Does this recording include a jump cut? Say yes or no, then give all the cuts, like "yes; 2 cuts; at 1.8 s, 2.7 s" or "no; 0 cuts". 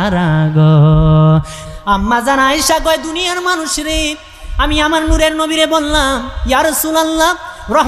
yes; 1 cut; at 1.6 s